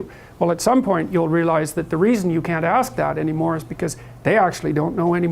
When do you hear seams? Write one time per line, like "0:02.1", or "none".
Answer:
0:03.3